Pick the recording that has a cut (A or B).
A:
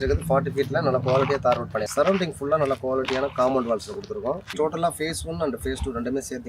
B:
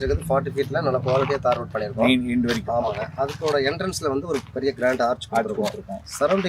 A